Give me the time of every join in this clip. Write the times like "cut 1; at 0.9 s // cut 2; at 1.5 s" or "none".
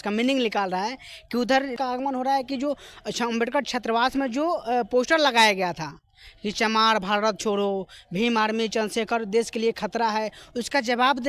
cut 1; at 1.7 s